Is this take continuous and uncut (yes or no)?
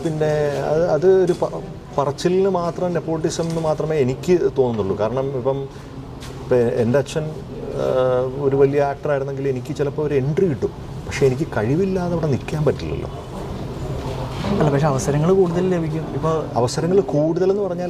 yes